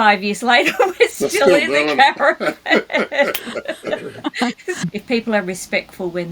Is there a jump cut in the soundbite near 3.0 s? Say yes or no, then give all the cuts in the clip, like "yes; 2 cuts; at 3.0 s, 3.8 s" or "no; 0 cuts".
no; 1 cut; at 4.8 s